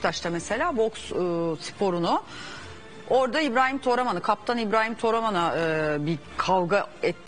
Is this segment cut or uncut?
uncut